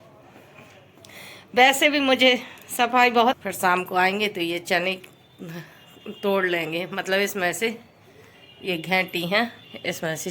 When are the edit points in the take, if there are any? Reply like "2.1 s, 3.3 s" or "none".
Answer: 3.4 s

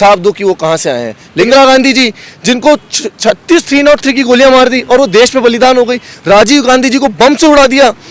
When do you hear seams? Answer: 1.5 s

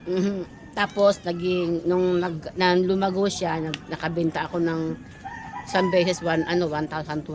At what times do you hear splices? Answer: none

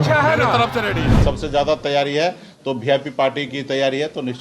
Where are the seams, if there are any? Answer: 1.2 s

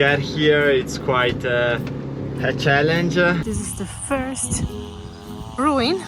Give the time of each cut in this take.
3.4 s

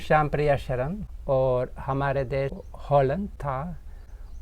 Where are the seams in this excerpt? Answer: 1.0 s, 2.6 s, 3.4 s

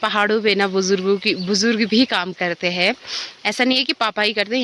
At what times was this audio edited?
none

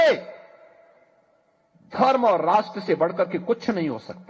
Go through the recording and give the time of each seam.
3.0 s

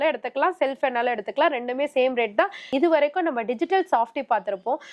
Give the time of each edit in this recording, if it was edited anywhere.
2.6 s

